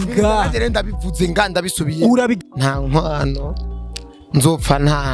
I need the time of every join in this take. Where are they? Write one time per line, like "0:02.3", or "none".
0:02.4